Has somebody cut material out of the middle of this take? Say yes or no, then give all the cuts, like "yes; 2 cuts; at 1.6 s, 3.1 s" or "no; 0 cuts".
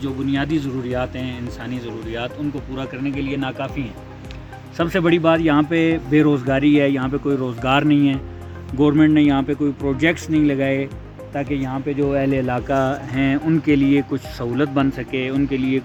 no; 0 cuts